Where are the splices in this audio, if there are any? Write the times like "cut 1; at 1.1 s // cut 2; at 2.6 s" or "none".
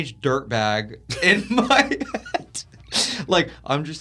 none